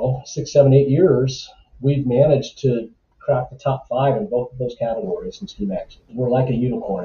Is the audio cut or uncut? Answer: cut